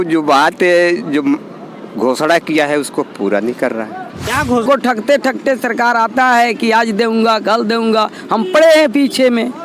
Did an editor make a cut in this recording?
yes; 1 cut; at 4.6 s

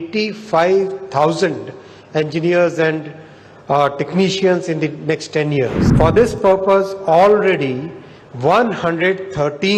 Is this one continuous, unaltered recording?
no; 1 cut; at 5.8 s

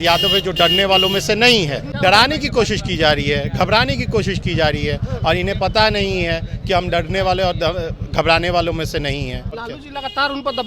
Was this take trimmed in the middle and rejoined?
yes; 2 cuts; at 1.8 s, 9.5 s

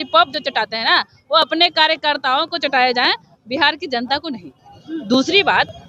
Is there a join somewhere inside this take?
no; 0 cuts

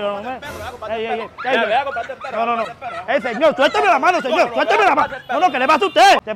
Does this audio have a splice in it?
no; 0 cuts

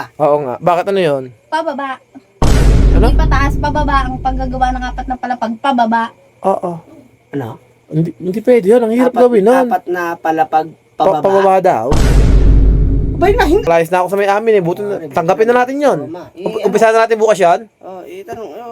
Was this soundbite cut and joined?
yes; 1 cut; at 13.7 s

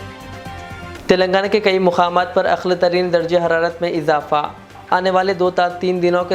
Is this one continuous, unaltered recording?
no; 1 cut; at 0.9 s

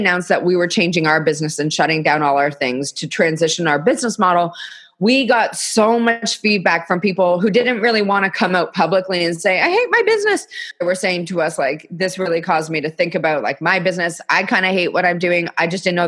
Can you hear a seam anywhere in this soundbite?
yes; 1 cut; at 10.6 s

